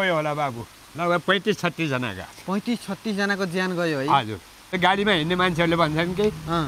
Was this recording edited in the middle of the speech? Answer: yes; 1 cut; at 4.6 s

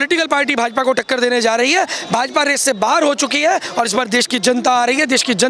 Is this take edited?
no; 0 cuts

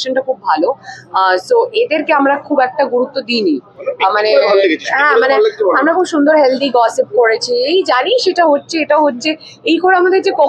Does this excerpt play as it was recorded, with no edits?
yes; 0 cuts

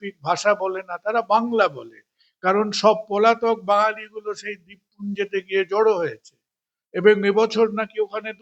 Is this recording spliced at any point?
no; 0 cuts

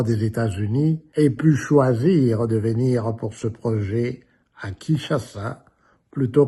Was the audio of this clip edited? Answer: yes; 1 cut; at 1.0 s

